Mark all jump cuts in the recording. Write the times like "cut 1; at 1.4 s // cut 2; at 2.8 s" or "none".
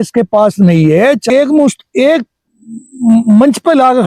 cut 1; at 1.2 s